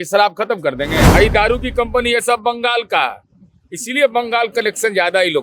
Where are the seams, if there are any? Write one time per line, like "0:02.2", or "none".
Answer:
0:01.1